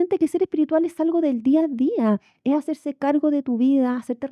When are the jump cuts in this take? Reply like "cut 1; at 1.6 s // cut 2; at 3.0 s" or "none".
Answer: none